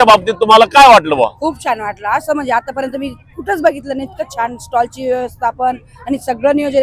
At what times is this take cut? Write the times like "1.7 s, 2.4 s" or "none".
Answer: none